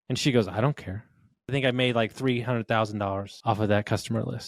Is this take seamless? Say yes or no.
no